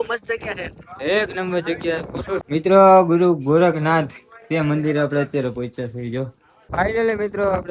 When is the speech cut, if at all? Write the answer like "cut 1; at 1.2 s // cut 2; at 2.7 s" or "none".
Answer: cut 1; at 2.4 s // cut 2; at 6.7 s